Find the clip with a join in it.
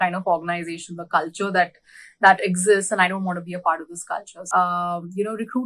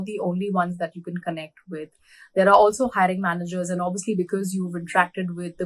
first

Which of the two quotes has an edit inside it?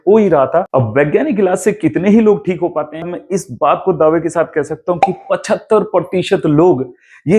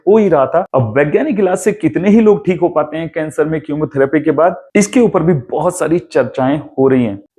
first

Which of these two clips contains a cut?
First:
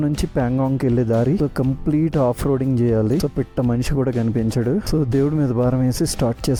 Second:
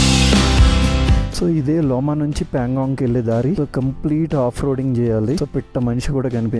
second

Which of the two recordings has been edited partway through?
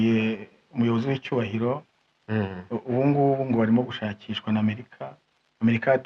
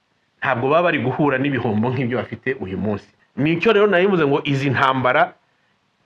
second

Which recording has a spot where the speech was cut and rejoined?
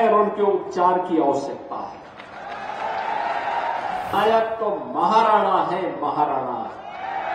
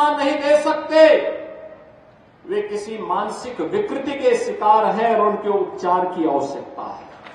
first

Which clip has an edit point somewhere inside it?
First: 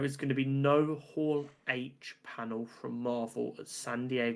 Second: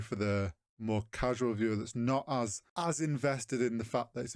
second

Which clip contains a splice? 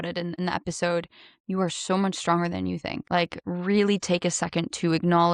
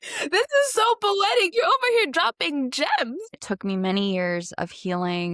second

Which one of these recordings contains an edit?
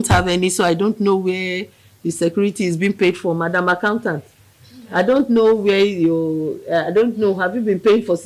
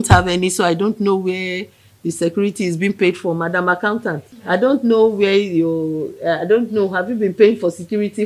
second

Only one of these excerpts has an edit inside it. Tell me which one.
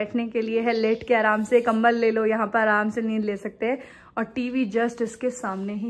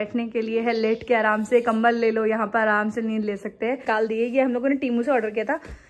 second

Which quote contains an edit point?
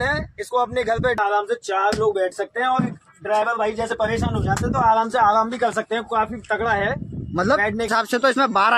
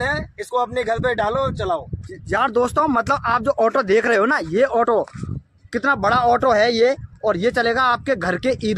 first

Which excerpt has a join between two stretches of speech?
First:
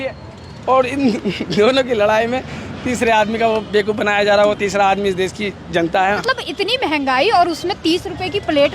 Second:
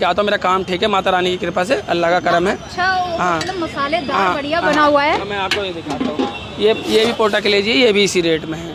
first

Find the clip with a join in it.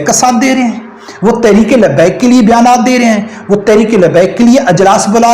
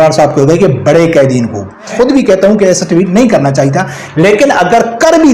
second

